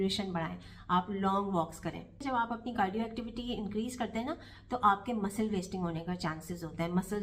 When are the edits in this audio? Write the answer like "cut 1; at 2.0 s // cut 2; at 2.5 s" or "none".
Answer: cut 1; at 2.2 s